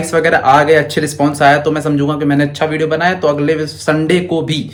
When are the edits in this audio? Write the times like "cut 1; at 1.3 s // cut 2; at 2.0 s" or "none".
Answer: none